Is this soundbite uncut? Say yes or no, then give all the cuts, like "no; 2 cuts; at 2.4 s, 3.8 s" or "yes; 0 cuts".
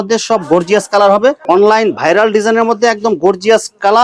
no; 1 cut; at 1.4 s